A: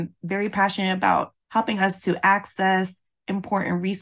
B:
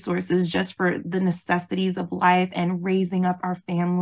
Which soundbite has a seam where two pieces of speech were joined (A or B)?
A